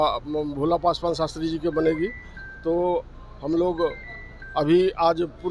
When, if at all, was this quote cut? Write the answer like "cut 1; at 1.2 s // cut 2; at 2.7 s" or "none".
none